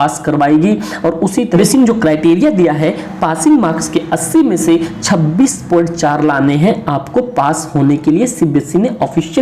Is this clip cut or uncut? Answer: cut